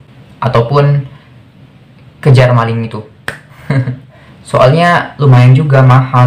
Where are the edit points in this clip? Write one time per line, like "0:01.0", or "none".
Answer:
0:04.1